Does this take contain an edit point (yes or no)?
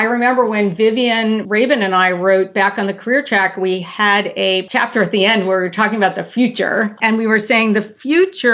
yes